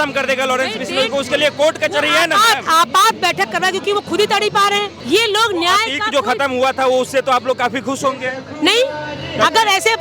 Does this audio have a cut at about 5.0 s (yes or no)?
yes